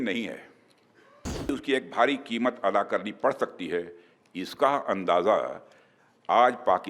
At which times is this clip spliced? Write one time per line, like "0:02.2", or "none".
0:01.5